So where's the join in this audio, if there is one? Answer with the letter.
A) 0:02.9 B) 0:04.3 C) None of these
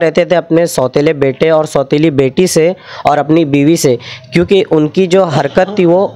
C